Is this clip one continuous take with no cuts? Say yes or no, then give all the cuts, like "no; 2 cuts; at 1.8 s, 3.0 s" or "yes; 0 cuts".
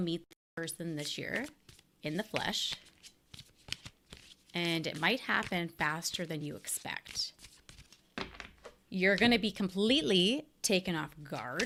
yes; 0 cuts